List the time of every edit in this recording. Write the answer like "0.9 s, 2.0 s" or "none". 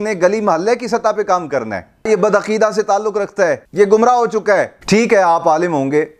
2.1 s, 3.6 s, 4.7 s